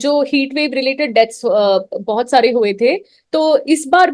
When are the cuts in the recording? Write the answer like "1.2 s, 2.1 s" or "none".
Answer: none